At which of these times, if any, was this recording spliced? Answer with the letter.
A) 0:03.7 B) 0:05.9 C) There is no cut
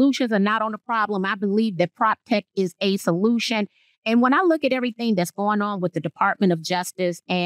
C